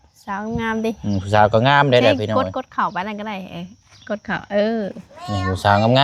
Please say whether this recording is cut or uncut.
uncut